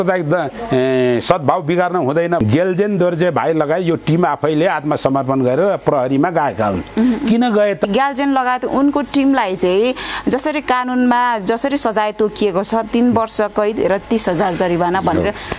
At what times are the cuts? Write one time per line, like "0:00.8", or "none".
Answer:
0:02.4
0:07.9

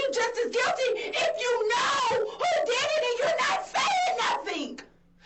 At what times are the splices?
none

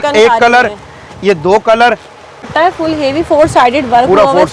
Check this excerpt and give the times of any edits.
0:02.4

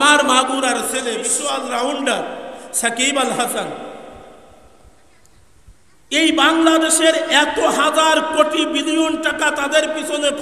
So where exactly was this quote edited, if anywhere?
0:01.4

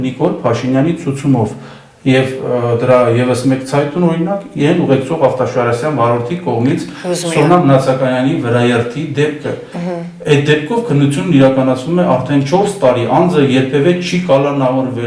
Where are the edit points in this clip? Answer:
none

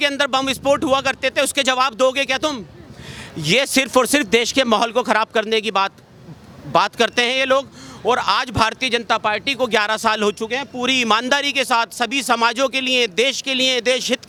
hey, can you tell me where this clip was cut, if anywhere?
none

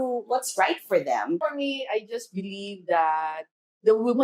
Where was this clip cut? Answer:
0:01.4

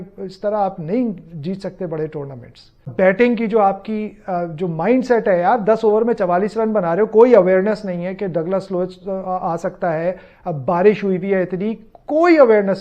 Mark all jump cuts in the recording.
0:02.9

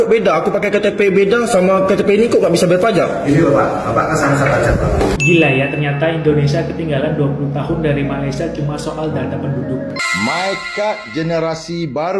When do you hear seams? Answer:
0:05.1
0:09.9

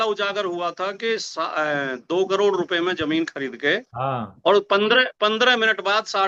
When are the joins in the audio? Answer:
none

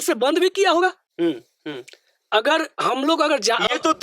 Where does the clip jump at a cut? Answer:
none

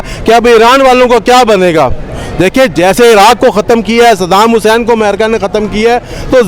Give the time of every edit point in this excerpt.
none

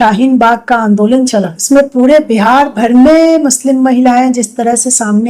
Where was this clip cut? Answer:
0:01.6

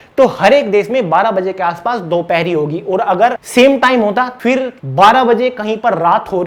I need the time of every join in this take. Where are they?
0:03.4
0:04.4

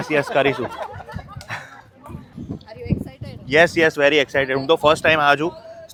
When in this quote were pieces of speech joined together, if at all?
none

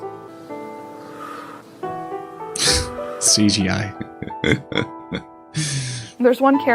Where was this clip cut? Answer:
none

